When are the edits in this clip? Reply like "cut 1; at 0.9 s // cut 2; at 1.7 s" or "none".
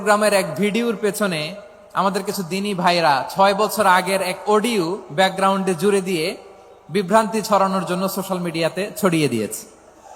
none